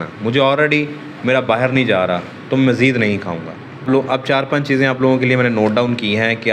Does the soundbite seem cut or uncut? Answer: uncut